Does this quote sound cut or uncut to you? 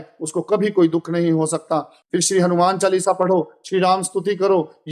uncut